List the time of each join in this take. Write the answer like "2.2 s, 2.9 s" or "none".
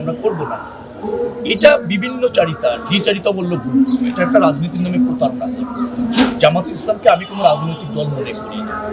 none